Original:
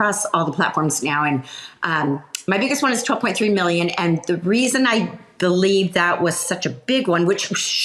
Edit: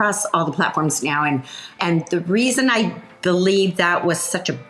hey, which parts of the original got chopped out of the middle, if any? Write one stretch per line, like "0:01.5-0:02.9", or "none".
0:01.8-0:04.0